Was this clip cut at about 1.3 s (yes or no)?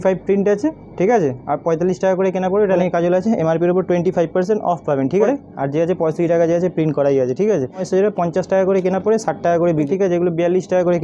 no